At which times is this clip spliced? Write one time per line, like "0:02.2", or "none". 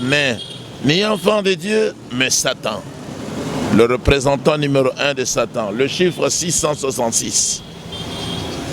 none